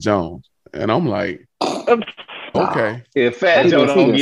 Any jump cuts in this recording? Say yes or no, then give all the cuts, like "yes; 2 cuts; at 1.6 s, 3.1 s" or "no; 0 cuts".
yes; 1 cut; at 2.5 s